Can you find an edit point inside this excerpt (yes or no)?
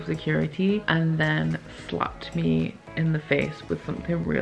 no